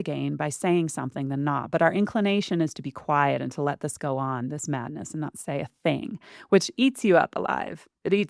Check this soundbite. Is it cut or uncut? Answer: uncut